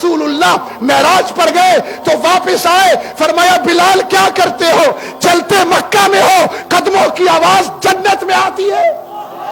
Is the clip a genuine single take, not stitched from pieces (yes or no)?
yes